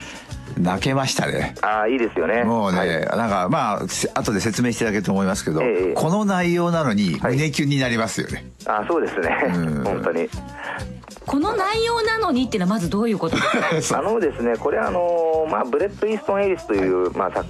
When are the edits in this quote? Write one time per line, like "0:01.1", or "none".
0:14.3